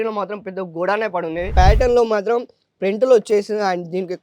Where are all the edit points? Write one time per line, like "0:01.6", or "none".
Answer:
0:01.5